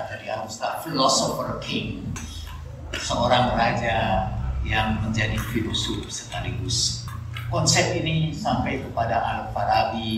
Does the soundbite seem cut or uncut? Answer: cut